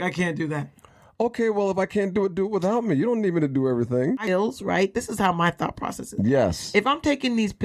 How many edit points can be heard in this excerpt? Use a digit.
1